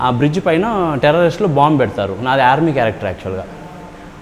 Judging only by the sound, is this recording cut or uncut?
uncut